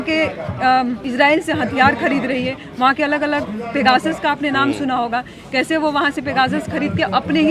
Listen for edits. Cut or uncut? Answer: cut